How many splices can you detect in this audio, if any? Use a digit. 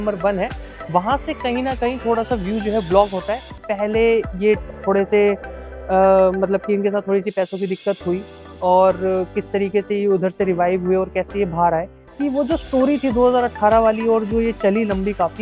2